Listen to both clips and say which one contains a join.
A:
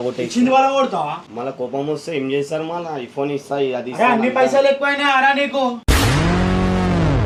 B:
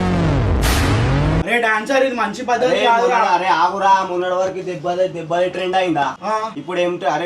B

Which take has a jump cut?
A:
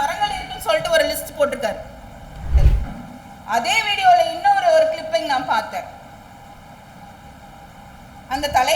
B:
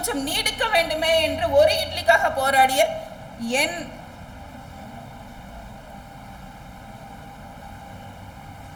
A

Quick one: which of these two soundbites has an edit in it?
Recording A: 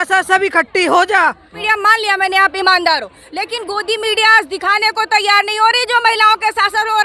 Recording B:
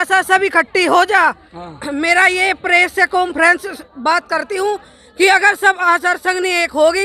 A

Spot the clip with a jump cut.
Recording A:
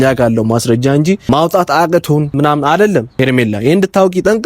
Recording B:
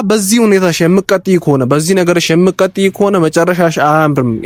A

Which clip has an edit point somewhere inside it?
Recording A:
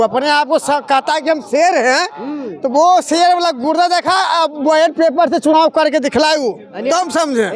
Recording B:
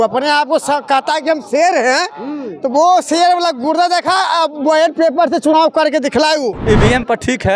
B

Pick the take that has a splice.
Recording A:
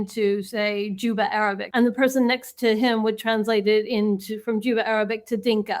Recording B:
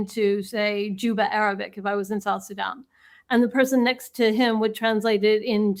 A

